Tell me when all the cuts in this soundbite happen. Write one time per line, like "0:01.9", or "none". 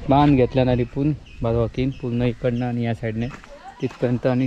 none